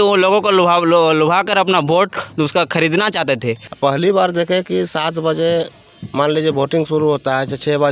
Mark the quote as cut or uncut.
cut